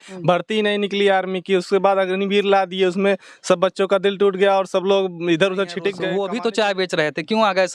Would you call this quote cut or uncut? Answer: cut